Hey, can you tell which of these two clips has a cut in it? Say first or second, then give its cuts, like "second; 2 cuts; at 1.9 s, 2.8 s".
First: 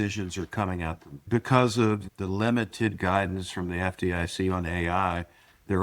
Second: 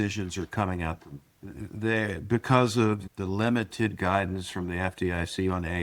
first; 1 cut; at 1.2 s